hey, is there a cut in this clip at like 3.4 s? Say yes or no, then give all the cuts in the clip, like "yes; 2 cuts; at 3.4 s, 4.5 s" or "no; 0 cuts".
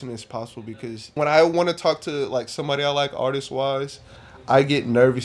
no; 1 cut; at 1.2 s